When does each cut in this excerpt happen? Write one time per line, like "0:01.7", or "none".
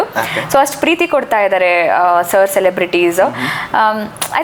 none